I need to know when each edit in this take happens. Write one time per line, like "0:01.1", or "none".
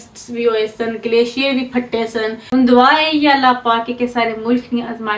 0:02.4